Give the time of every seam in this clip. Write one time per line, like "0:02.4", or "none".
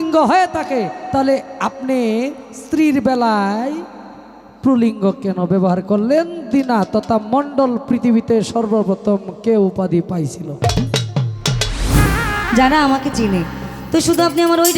0:12.0